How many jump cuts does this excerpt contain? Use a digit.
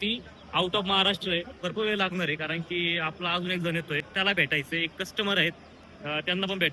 2